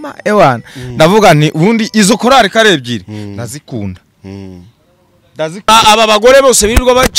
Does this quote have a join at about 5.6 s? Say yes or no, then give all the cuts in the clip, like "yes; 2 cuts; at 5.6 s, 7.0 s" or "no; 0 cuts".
yes; 1 cut; at 5.6 s